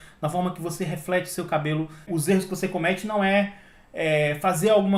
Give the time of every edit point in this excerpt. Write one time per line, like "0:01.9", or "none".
none